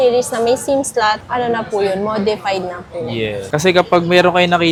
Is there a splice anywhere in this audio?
no; 0 cuts

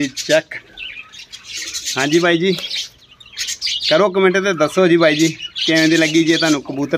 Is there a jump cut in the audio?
no; 0 cuts

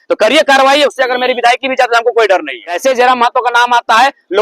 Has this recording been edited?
yes; 1 cut; at 2.6 s

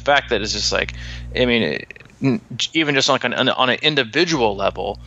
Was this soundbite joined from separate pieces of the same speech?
no; 0 cuts

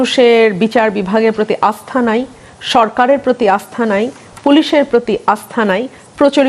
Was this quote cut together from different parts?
no; 0 cuts

